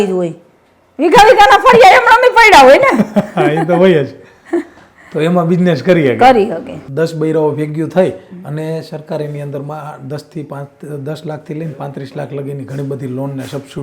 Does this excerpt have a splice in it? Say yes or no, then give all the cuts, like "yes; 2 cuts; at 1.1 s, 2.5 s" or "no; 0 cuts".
yes; 1 cut; at 6.8 s